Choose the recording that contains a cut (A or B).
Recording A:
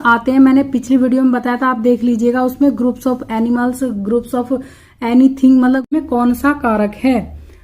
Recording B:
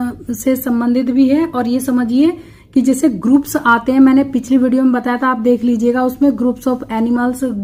A